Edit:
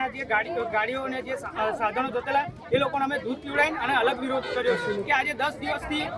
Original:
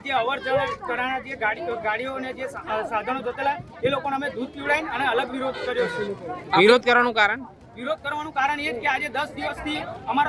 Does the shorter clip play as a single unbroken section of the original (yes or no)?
no